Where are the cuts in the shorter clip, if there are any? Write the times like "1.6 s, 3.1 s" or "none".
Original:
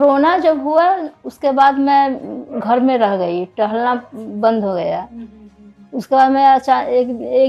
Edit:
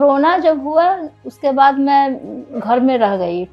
none

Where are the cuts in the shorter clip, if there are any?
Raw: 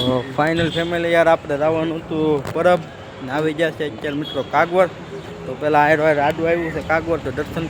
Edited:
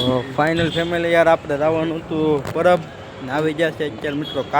none

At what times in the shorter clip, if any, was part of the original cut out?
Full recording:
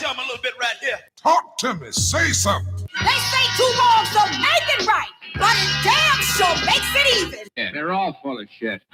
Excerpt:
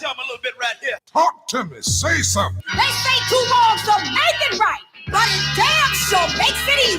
1.0 s, 2.6 s

